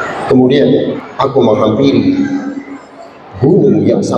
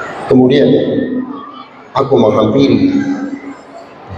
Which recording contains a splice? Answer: first; 1 cut; at 1.0 s

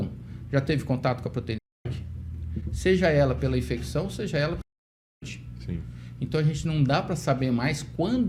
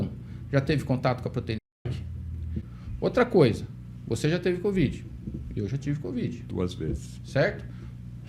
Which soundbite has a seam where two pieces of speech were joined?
second; 1 cut; at 2.6 s

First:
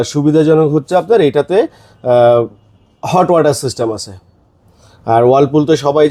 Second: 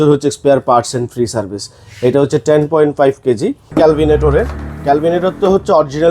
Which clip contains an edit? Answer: second; 1 cut; at 3.7 s

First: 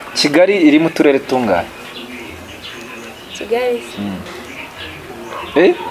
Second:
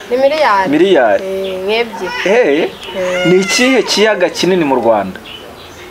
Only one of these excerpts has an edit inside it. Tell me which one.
first; 1 cut; at 4.3 s

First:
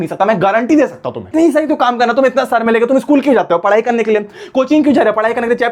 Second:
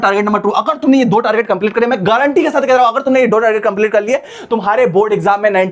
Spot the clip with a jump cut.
first; 1 cut; at 1.3 s

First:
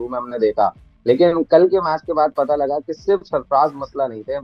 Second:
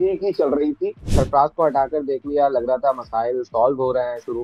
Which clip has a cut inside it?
second; 1 cut; at 1.1 s

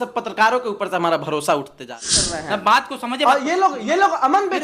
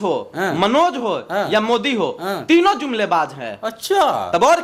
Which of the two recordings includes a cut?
first; 1 cut; at 2.0 s

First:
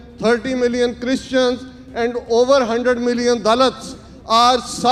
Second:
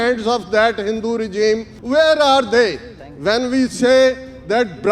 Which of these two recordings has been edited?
second; 1 cut; at 1.7 s

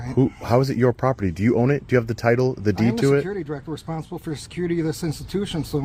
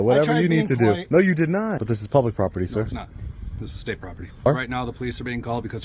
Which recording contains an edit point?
second; 2 cuts; at 1.9 s, 4.5 s

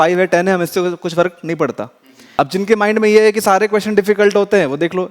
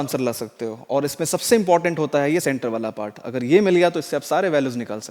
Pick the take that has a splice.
first; 1 cut; at 2.2 s

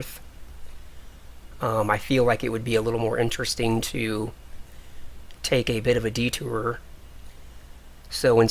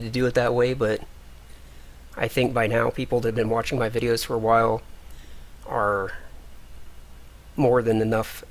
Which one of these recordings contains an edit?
first; 1 cut; at 5.7 s

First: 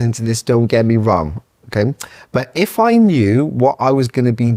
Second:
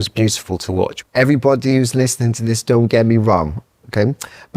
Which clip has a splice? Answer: second; 1 cut; at 1.0 s

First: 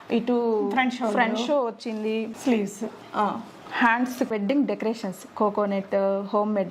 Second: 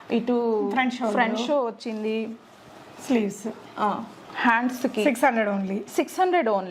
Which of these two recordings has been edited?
first; 2 cuts; at 2.3 s, 4.3 s

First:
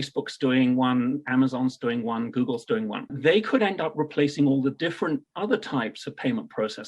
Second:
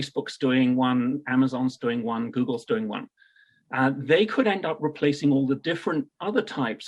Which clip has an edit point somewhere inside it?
first; 1 cut; at 3.1 s

